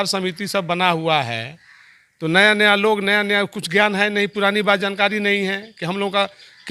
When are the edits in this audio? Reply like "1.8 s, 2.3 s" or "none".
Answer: none